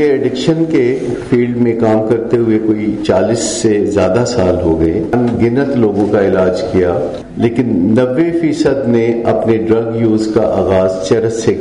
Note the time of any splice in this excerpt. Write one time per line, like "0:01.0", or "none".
0:05.1
0:07.2